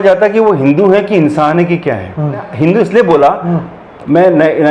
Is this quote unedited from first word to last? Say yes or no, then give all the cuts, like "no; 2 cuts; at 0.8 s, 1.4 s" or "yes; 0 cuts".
no; 1 cut; at 2.5 s